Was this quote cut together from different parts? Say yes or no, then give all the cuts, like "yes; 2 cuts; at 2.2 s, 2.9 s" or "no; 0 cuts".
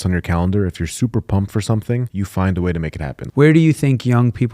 yes; 2 cuts; at 2.1 s, 3.1 s